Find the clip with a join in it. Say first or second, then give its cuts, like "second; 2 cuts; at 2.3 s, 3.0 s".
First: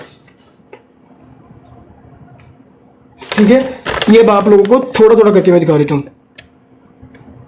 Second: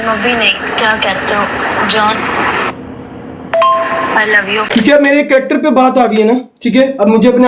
second; 1 cut; at 4.7 s